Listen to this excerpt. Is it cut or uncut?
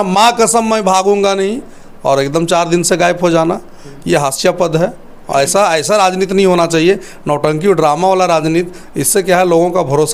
uncut